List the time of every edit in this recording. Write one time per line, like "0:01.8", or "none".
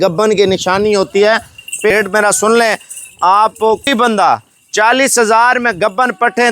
0:01.9
0:03.9